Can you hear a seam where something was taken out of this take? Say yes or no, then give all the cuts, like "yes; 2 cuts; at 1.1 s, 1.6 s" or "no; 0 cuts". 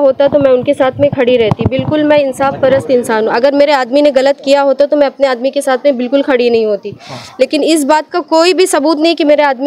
no; 0 cuts